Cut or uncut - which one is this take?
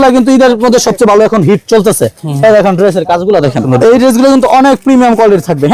cut